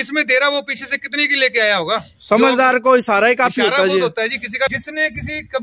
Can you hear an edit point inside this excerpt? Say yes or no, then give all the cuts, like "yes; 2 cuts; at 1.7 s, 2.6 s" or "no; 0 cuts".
yes; 1 cut; at 4.7 s